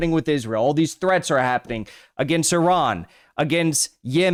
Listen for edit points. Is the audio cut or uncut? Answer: uncut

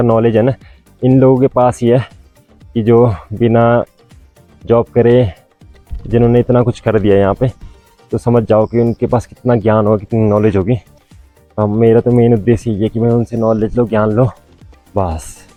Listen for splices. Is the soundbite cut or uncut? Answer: uncut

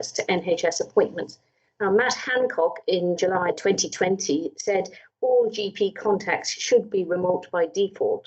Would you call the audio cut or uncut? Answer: cut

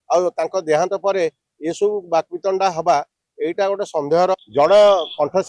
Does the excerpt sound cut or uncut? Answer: cut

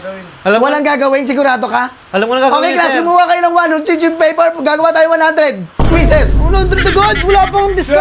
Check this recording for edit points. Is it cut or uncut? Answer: uncut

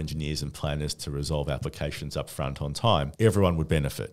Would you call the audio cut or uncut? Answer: cut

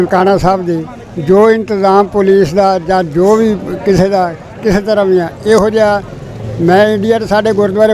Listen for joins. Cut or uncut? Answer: uncut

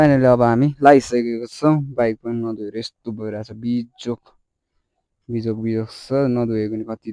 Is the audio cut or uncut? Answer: uncut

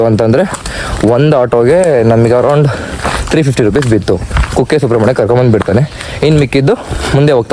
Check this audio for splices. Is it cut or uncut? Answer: uncut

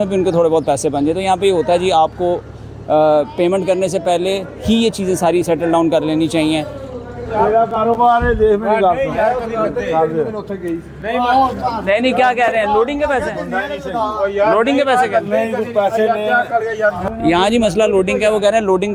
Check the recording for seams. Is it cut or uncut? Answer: uncut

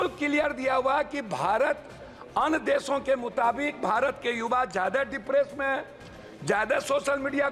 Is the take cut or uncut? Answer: uncut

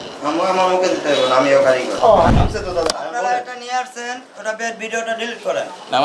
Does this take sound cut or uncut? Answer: cut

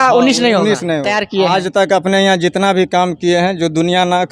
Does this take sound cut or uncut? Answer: cut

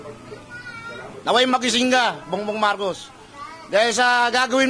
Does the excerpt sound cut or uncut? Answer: uncut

